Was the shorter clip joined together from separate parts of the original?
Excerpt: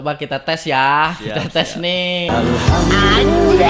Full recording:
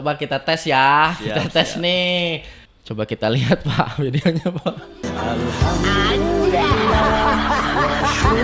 yes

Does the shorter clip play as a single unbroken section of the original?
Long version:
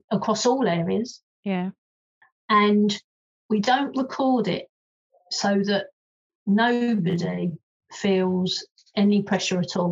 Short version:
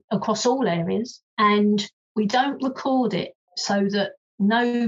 no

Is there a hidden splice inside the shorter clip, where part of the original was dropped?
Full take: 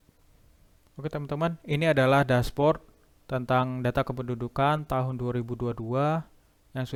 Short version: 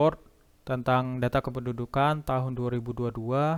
no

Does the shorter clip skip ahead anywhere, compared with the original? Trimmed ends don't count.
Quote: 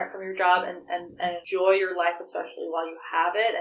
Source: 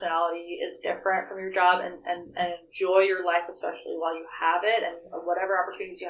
yes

